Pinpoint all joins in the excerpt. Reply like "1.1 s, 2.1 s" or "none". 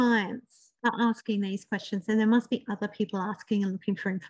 none